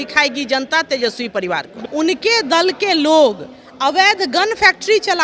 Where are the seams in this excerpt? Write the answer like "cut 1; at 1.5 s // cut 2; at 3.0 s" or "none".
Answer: cut 1; at 1.8 s

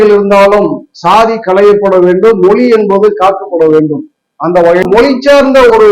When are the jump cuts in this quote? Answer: cut 1; at 4.8 s

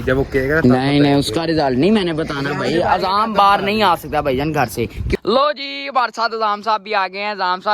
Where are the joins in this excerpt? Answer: cut 1; at 5.2 s

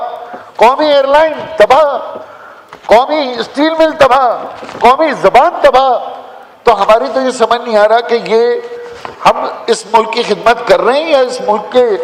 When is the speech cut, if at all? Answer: none

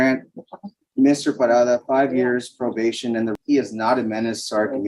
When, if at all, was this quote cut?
cut 1; at 3.3 s

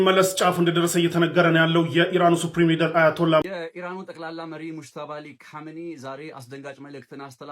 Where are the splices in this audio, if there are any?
cut 1; at 3.4 s

